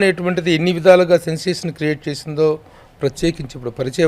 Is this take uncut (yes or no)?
yes